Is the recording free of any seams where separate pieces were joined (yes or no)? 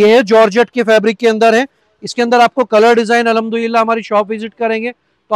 yes